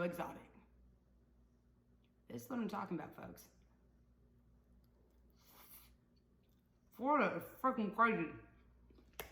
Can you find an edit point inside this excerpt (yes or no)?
no